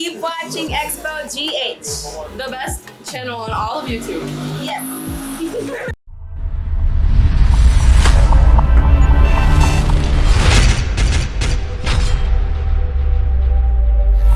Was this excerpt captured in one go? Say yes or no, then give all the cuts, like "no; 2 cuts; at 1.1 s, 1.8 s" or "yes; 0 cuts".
yes; 0 cuts